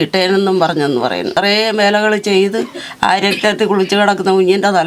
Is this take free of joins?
no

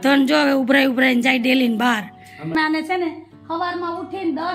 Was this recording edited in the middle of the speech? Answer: yes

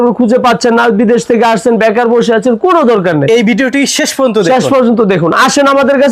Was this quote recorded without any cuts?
yes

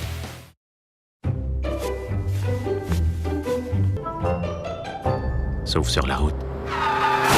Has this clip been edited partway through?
yes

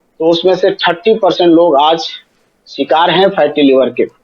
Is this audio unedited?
yes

